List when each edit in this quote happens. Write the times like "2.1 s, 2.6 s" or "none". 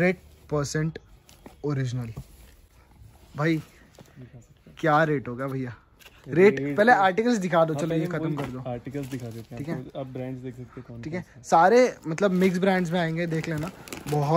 none